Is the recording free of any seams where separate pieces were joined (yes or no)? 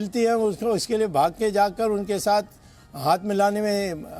yes